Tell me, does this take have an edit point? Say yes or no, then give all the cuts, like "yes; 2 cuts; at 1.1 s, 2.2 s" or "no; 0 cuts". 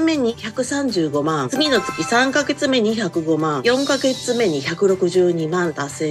no; 0 cuts